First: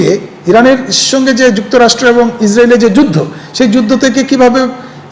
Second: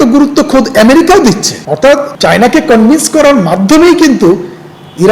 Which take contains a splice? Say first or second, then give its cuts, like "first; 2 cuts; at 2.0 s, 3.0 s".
second; 1 cut; at 1.7 s